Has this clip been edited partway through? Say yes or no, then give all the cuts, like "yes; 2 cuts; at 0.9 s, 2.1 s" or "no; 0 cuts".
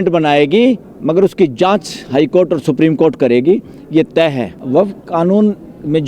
yes; 1 cut; at 4.5 s